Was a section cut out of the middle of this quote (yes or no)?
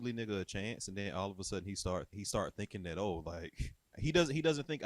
yes